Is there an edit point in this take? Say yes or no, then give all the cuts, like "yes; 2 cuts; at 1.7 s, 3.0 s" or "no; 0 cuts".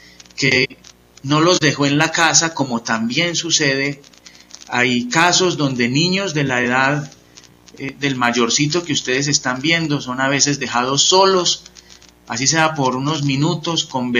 no; 0 cuts